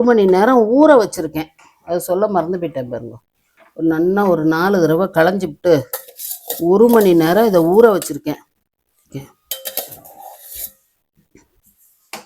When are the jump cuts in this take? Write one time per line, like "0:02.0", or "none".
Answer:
0:09.1